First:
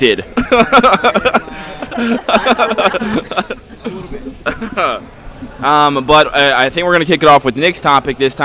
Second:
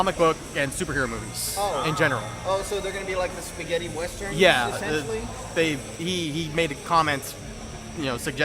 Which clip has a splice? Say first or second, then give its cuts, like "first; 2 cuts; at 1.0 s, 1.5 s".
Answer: first; 1 cut; at 2.6 s